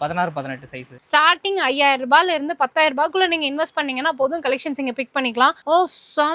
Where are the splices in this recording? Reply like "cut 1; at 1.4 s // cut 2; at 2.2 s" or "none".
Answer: cut 1; at 0.9 s